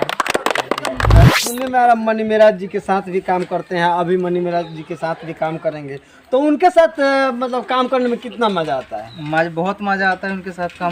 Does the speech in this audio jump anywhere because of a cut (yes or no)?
yes